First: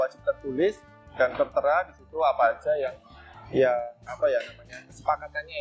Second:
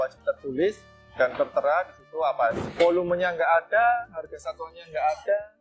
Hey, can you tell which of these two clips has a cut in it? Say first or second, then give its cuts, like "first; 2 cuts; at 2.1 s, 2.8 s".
second; 1 cut; at 2.6 s